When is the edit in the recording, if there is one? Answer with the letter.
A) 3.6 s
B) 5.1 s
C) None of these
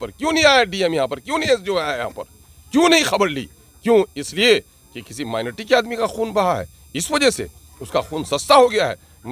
C